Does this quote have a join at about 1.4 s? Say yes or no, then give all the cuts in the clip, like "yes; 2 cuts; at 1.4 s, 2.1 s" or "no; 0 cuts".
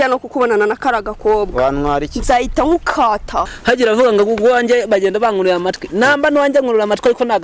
no; 1 cut; at 3.5 s